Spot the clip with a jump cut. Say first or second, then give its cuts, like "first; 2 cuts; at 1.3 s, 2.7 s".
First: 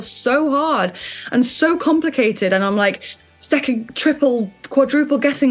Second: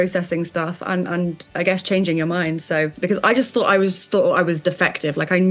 second; 1 cut; at 3.0 s